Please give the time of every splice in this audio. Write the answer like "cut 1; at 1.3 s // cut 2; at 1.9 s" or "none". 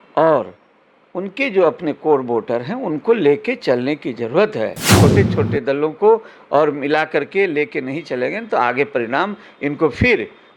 cut 1; at 4.9 s